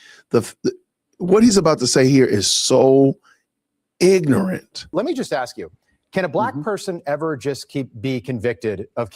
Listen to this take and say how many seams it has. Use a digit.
1